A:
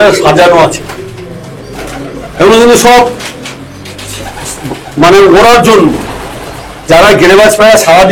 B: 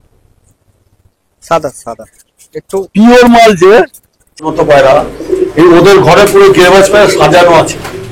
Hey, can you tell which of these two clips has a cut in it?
B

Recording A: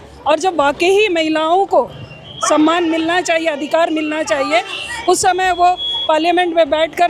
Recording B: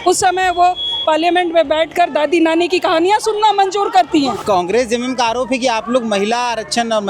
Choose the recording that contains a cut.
B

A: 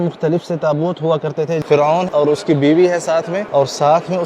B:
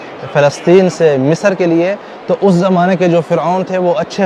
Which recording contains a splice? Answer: A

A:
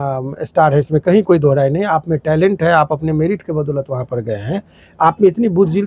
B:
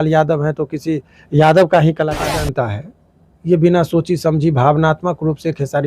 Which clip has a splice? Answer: B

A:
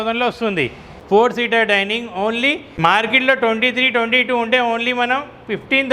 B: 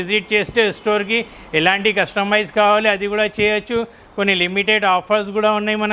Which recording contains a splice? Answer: A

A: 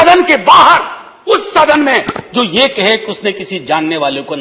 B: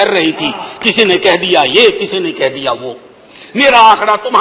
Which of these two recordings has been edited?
B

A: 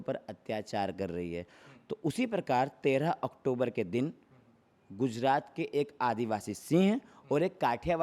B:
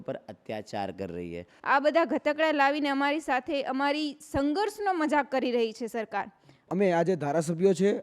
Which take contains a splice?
B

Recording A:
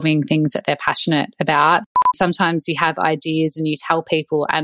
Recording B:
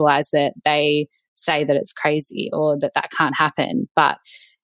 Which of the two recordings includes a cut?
A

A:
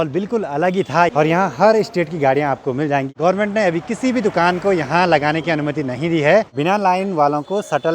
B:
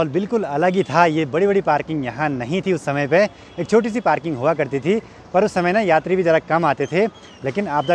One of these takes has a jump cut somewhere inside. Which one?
A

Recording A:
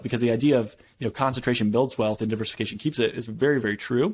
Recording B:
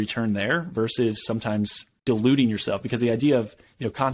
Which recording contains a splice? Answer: B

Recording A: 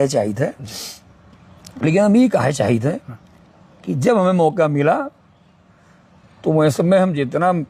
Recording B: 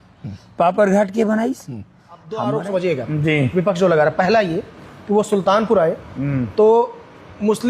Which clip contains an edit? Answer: B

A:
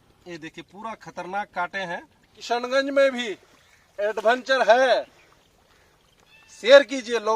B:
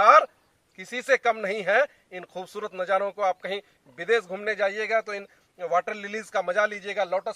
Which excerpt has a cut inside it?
A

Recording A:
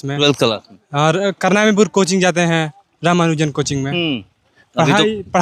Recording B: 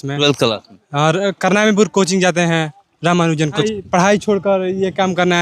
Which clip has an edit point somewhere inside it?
B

